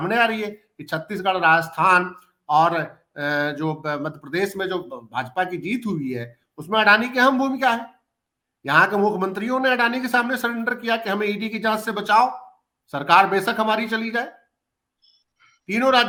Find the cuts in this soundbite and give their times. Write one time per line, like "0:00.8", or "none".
none